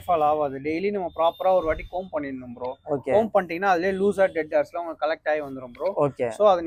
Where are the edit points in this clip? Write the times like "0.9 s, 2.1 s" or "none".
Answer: none